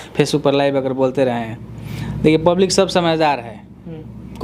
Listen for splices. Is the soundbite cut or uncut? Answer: uncut